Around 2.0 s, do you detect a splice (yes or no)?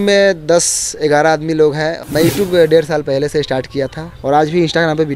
yes